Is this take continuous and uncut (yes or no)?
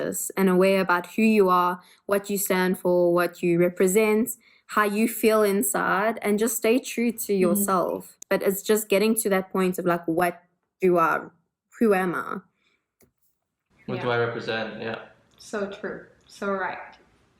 yes